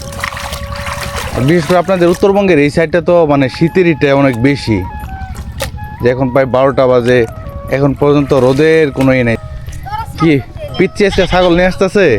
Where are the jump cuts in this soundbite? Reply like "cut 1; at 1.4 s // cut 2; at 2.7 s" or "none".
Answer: cut 1; at 9.4 s